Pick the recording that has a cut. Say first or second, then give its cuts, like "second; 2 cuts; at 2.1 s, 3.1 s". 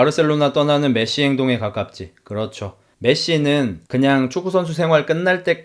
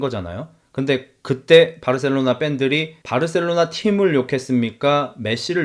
first; 1 cut; at 2.9 s